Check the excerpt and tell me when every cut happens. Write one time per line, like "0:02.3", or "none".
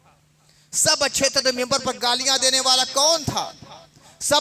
none